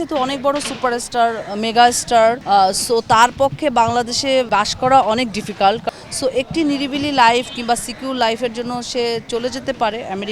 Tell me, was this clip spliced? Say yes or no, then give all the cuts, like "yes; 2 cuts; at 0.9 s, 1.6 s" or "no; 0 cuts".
yes; 3 cuts; at 2.4 s, 4.5 s, 5.8 s